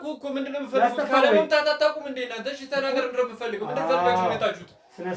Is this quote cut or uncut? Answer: uncut